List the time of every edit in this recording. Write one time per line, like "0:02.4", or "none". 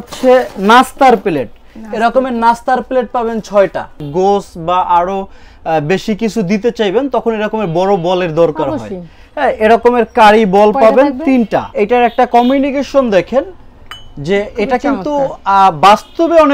0:04.0
0:11.7